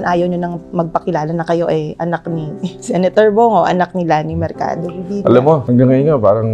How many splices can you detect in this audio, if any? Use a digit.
1